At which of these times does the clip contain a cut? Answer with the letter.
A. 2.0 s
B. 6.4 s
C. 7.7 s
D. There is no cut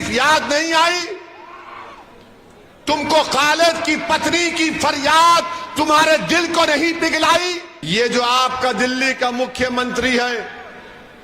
C